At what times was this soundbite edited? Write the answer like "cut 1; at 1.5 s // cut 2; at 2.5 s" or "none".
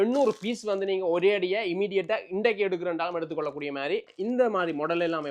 cut 1; at 4.1 s